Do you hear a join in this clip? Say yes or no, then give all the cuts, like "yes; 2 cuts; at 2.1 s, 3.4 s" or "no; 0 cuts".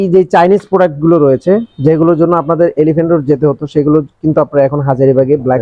no; 0 cuts